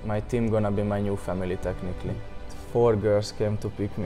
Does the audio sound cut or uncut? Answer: cut